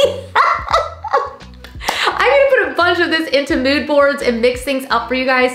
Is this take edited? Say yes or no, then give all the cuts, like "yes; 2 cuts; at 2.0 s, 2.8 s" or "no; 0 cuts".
no; 0 cuts